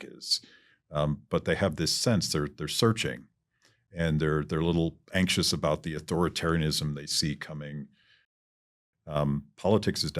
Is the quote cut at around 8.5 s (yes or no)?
yes